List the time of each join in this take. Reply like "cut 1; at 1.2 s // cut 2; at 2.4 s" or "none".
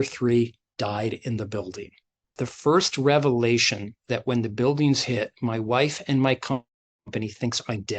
cut 1; at 2.4 s